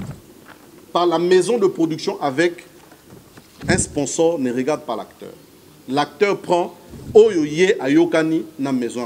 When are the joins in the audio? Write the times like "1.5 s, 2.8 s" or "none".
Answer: none